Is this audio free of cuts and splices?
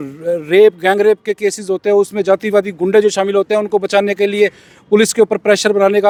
yes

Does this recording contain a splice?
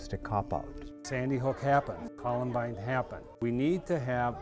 yes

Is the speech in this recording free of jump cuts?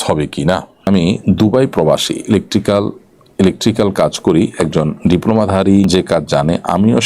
no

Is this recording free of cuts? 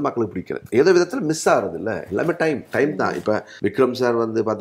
no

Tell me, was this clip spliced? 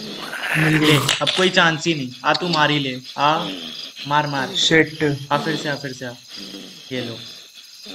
no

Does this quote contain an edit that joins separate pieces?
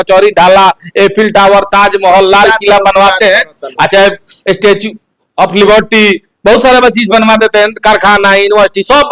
no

